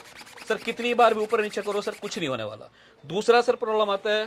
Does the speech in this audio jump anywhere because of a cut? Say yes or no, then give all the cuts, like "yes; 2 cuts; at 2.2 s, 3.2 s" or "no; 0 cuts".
no; 0 cuts